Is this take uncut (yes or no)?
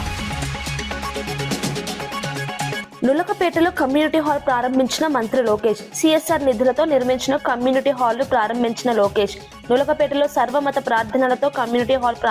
no